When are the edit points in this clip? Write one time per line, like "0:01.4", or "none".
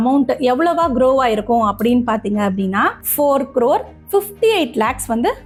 none